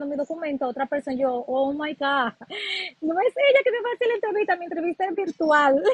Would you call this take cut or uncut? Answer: uncut